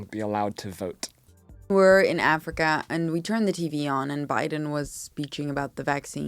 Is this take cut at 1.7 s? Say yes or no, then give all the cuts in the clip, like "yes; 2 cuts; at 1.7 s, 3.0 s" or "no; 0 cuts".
yes; 1 cut; at 1.7 s